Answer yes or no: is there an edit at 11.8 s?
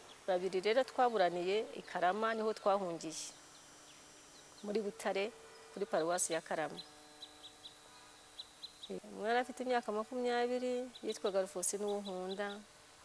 no